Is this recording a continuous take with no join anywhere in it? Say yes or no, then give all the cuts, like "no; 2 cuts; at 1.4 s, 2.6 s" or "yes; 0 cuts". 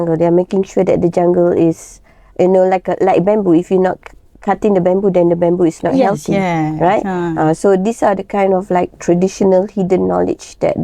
yes; 0 cuts